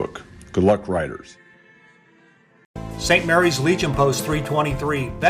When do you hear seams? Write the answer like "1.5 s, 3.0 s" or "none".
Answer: 2.7 s